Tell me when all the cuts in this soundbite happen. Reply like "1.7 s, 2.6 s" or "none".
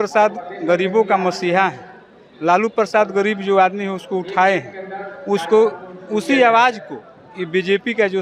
none